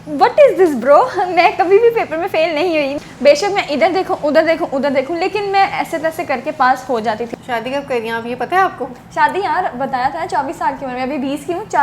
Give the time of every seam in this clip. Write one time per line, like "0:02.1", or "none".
0:02.9
0:07.3